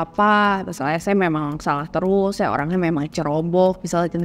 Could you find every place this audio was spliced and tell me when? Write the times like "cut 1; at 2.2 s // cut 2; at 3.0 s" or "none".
none

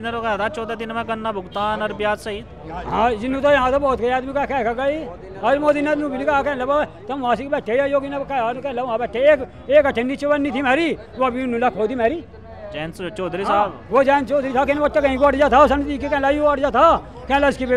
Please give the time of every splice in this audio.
none

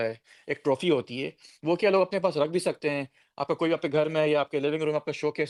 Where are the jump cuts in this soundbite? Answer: none

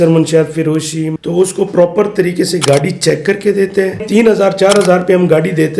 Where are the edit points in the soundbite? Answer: cut 1; at 1.0 s // cut 2; at 4.1 s

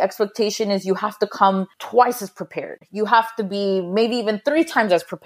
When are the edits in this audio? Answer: cut 1; at 1.8 s

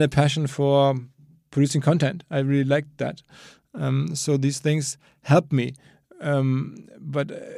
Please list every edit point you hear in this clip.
none

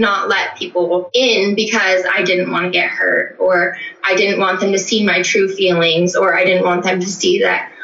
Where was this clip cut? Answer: cut 1; at 1.1 s

